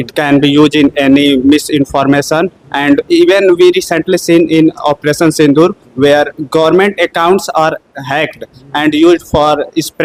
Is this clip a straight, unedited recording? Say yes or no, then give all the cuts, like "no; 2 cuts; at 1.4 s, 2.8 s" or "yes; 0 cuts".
yes; 0 cuts